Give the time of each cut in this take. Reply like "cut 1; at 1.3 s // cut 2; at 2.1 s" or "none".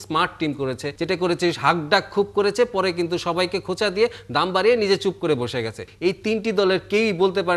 cut 1; at 0.9 s // cut 2; at 5.9 s